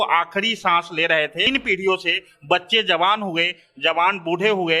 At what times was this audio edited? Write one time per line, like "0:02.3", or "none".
0:01.5